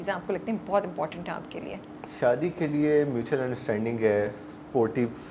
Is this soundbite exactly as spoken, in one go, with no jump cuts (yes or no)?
yes